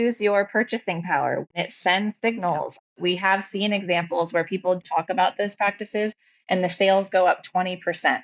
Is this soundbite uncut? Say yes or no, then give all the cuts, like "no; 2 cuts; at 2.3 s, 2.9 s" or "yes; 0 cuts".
no; 3 cuts; at 1.5 s, 3.0 s, 4.8 s